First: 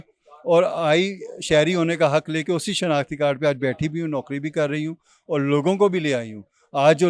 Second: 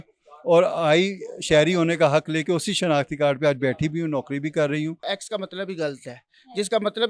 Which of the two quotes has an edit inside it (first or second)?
second